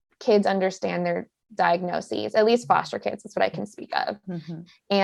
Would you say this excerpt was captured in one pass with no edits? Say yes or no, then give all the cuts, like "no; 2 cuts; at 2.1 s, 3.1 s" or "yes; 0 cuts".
yes; 0 cuts